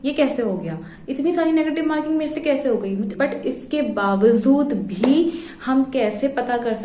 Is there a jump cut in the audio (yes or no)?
yes